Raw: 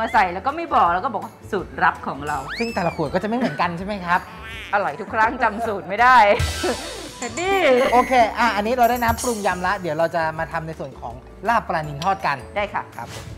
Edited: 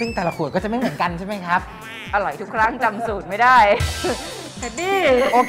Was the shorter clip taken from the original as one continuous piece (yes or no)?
yes